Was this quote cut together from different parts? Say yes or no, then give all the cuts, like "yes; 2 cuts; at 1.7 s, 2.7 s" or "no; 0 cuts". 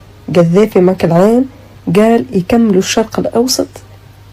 no; 0 cuts